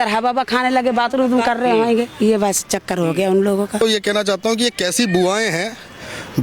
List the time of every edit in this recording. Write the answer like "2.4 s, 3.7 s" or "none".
3.8 s